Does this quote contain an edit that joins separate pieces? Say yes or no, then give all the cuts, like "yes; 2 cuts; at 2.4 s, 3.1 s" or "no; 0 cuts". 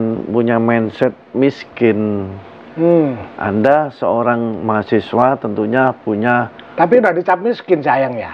no; 0 cuts